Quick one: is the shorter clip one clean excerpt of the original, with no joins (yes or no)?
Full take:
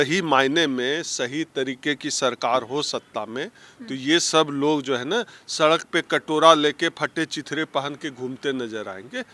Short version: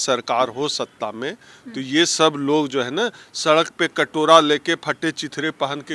yes